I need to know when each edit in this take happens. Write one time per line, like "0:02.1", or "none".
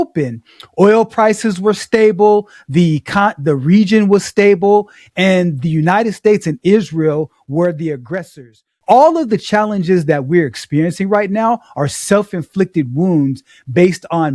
0:08.7